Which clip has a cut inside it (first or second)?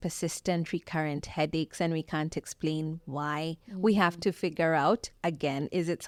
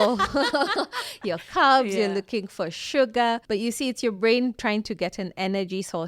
second